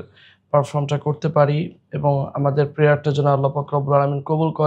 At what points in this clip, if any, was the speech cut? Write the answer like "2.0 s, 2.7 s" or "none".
none